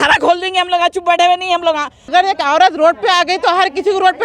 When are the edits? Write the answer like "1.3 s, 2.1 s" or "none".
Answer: 2.1 s

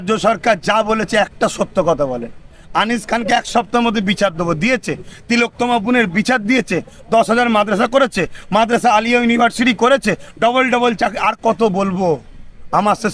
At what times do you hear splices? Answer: none

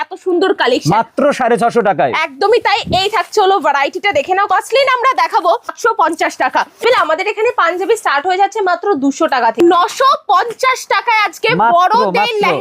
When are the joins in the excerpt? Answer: 4.5 s, 5.7 s, 6.8 s, 9.6 s

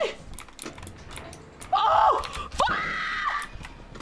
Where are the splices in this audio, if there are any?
none

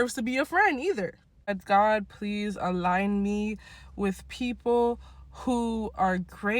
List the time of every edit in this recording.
1.5 s

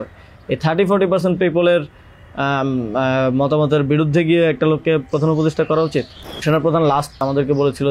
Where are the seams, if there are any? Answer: 6.4 s, 7.2 s

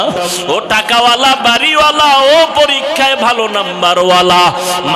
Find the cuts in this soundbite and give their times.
none

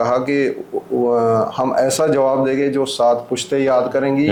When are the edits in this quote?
none

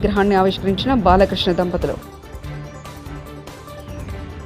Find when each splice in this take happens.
none

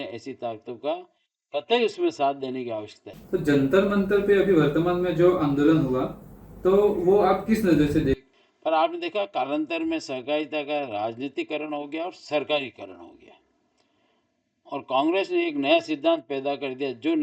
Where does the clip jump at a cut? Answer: 3.1 s, 8.3 s

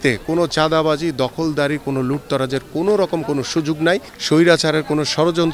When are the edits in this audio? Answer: 4.1 s

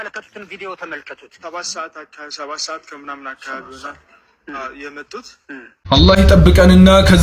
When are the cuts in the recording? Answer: 5.8 s

